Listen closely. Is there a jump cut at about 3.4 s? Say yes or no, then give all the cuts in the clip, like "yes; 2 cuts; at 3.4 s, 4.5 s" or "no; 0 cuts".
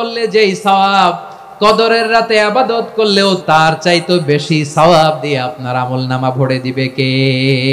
yes; 1 cut; at 3.4 s